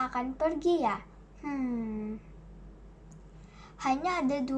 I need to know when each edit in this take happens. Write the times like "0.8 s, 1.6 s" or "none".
none

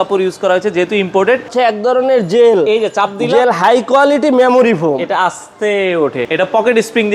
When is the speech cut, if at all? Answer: 1.5 s, 6.2 s

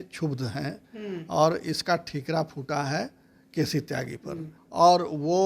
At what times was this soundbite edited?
4.6 s

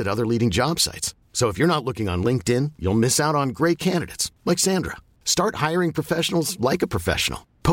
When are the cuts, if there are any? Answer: none

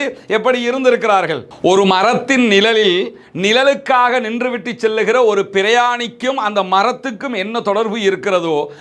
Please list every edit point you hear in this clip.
1.5 s

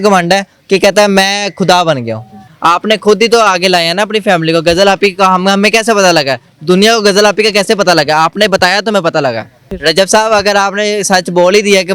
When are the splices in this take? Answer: 2.5 s, 9.7 s

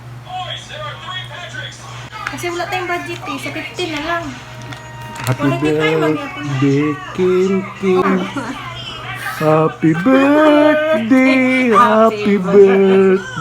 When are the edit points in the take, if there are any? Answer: 2.1 s, 8.0 s

